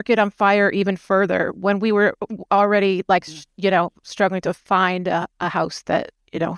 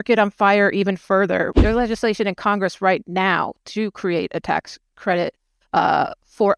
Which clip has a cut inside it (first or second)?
second